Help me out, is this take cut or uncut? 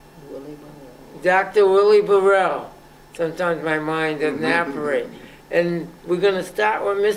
uncut